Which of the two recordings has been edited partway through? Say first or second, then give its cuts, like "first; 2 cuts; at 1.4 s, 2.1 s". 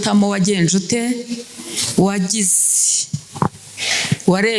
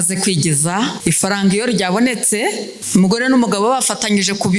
second; 2 cuts; at 1.0 s, 2.7 s